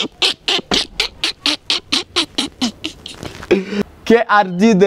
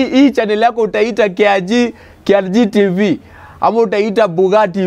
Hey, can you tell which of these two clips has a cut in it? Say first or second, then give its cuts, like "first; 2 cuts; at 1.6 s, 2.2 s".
first; 1 cut; at 3.8 s